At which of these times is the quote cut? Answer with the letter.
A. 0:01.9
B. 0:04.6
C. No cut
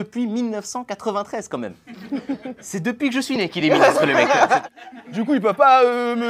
B